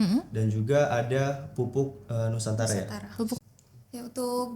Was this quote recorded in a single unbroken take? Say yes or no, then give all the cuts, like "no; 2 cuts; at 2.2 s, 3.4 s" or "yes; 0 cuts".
no; 1 cut; at 3.4 s